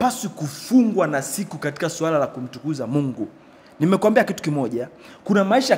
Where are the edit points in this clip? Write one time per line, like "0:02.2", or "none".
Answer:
none